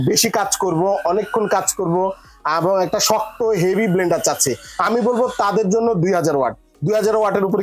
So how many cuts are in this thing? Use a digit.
0